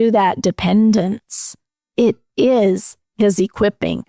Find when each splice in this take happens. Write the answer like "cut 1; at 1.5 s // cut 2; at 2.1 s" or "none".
none